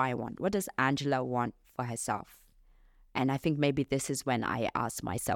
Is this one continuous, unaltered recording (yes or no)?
yes